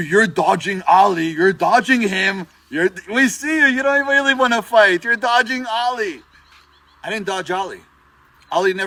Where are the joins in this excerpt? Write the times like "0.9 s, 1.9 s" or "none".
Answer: none